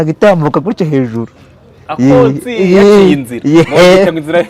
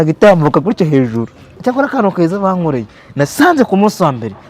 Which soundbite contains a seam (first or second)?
second